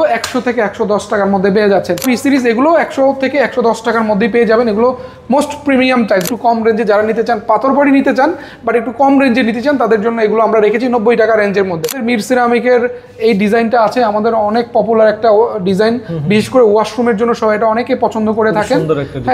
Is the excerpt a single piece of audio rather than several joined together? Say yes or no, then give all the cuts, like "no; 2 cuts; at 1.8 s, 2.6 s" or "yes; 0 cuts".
no; 3 cuts; at 2.0 s, 6.3 s, 12.0 s